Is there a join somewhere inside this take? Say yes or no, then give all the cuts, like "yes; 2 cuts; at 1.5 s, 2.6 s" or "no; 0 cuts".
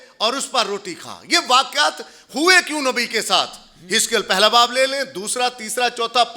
no; 0 cuts